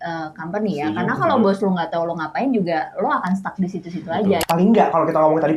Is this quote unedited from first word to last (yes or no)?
no